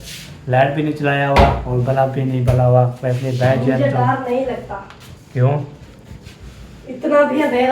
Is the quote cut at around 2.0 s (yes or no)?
no